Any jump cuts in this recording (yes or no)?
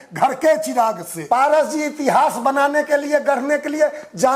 yes